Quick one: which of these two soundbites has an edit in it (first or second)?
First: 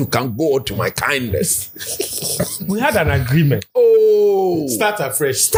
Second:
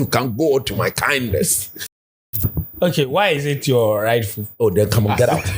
second